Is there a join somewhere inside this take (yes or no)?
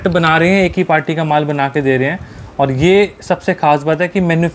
no